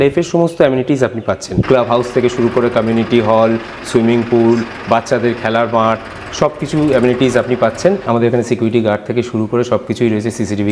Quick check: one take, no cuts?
no; 2 cuts; at 1.5 s, 8.0 s

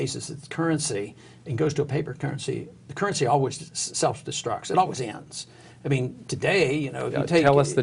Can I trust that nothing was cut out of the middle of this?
yes; 0 cuts

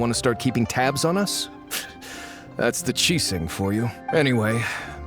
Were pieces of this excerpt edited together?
yes; 1 cut; at 4.1 s

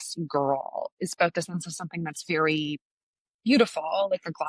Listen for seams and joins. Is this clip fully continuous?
yes; 0 cuts

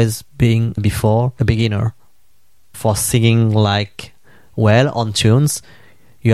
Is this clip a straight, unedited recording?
yes; 0 cuts

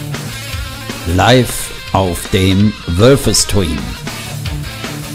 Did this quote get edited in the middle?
no; 0 cuts

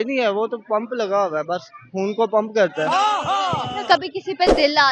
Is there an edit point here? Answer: no; 0 cuts

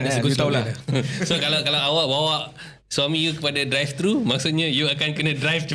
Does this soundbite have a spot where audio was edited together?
no; 0 cuts

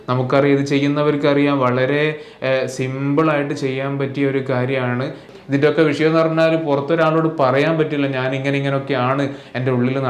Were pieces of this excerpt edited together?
yes; 1 cut; at 5.3 s

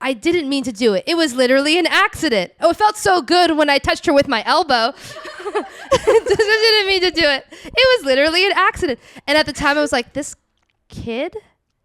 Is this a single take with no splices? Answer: yes; 0 cuts

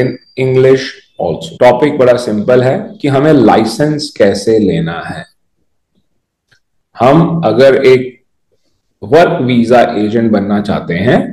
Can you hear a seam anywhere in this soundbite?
yes; 1 cut; at 1.4 s

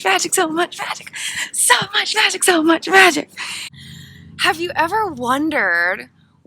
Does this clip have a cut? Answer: yes; 1 cut; at 3.7 s

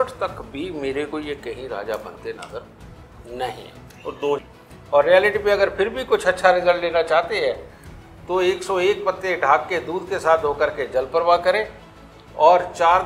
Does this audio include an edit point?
yes; 1 cut; at 4.4 s

